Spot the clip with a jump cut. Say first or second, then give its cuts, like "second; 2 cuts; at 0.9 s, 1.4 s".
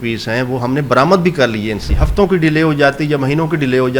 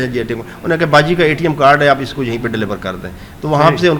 first; 1 cut; at 1.9 s